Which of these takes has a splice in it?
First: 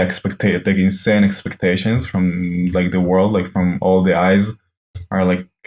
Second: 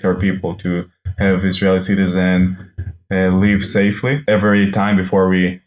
second; 1 cut; at 4.2 s

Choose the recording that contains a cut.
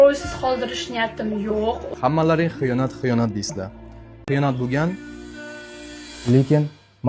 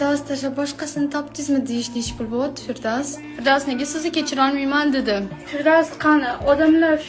first; 1 cut; at 4.2 s

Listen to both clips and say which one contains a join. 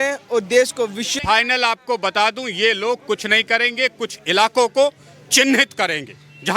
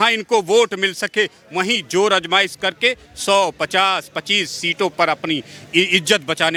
first; 1 cut; at 1.1 s

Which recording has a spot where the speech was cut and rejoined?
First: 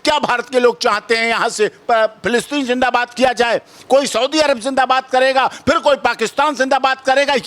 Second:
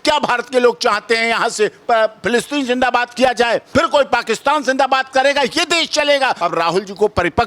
second; 2 cuts; at 3.7 s, 6.4 s

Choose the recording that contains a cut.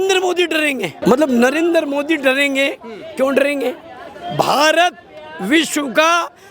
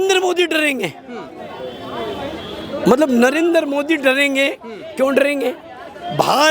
first; 1 cut; at 1.0 s

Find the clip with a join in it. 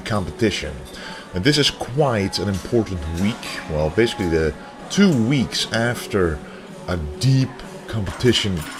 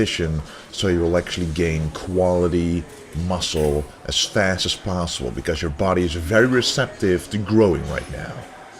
second; 1 cut; at 4.4 s

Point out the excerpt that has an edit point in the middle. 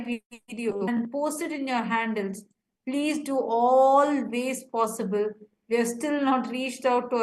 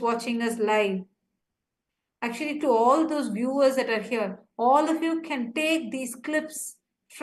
first; 1 cut; at 1.8 s

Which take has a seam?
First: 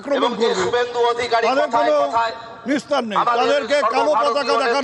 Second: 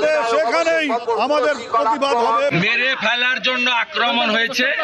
second; 2 cuts; at 1.0 s, 2.5 s

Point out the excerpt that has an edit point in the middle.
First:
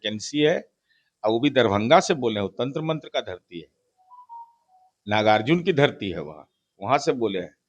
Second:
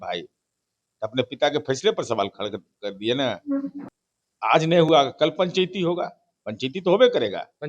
second; 1 cut; at 3.8 s

